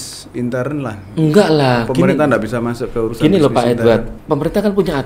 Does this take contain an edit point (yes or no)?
yes